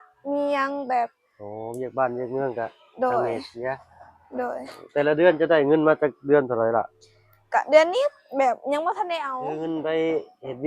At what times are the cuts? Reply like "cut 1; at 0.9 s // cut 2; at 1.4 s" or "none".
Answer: cut 1; at 9.4 s